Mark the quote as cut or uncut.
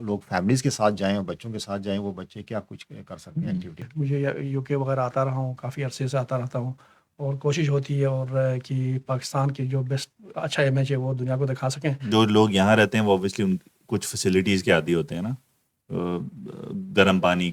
cut